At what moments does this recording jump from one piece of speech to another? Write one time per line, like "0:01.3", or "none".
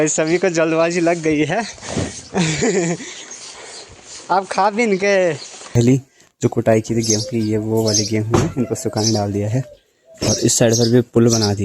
0:05.8